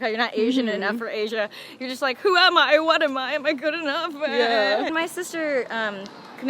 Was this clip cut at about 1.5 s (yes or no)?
no